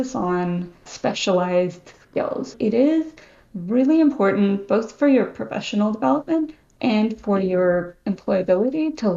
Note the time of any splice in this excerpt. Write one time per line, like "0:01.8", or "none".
0:00.9
0:02.5